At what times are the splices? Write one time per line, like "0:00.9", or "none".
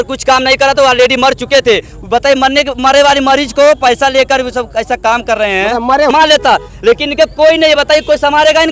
0:06.1